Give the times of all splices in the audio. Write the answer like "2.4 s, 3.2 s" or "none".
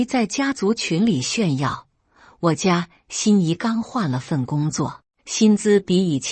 none